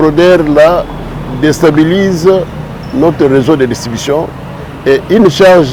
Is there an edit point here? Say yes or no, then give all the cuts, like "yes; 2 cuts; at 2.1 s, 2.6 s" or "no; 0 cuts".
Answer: no; 0 cuts